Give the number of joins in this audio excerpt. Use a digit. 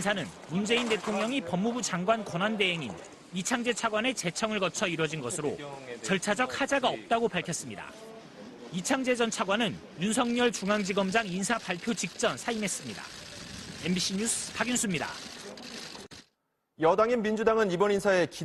0